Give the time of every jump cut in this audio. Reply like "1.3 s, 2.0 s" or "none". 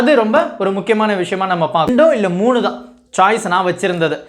1.9 s